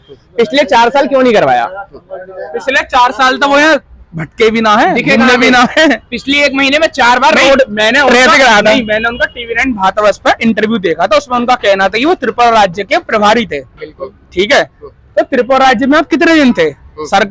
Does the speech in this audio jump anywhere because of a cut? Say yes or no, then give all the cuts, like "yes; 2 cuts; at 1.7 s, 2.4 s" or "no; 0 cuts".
no; 0 cuts